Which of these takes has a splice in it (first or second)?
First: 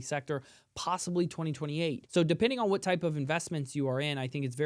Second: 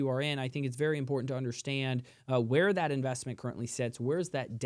first